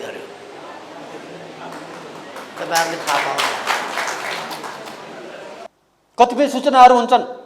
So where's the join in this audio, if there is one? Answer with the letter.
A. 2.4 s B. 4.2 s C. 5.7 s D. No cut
C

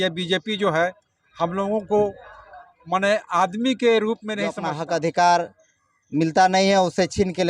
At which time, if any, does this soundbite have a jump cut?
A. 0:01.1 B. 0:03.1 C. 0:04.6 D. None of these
C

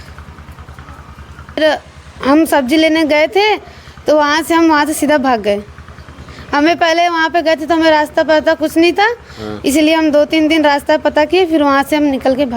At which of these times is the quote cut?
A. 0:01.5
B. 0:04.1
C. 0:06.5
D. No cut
A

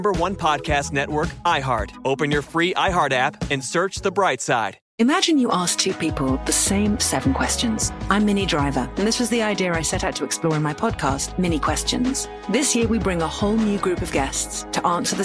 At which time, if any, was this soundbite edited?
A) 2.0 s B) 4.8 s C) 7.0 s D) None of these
B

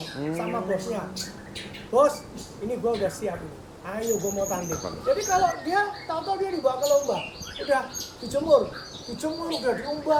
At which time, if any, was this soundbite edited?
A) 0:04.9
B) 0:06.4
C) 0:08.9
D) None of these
A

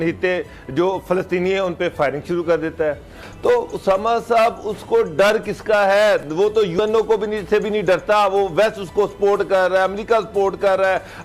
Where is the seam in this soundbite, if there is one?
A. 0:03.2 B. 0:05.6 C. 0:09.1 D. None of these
A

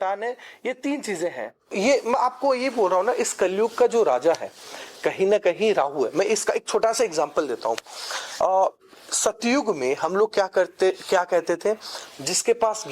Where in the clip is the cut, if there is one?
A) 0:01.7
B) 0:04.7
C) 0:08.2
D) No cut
A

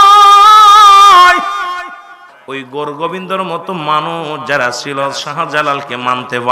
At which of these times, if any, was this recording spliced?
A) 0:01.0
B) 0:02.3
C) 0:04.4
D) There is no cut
B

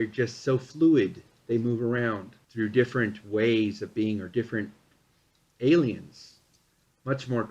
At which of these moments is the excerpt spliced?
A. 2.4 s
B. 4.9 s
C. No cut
A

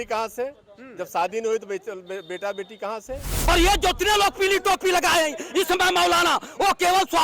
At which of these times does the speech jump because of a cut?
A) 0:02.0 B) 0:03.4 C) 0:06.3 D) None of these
B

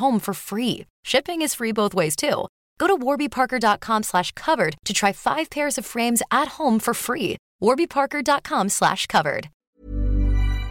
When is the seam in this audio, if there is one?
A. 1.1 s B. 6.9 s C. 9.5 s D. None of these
C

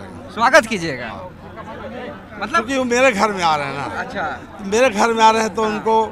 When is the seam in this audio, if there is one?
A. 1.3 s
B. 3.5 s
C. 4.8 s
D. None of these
D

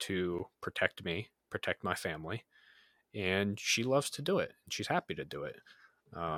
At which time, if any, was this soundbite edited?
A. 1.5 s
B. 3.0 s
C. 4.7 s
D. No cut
D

